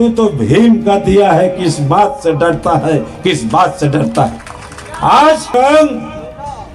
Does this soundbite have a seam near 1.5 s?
no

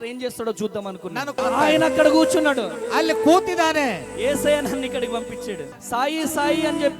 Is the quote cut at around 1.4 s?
yes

